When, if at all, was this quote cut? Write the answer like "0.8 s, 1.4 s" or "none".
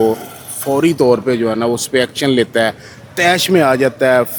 none